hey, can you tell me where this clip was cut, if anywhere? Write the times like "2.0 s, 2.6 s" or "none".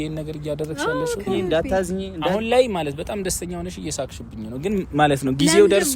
1.5 s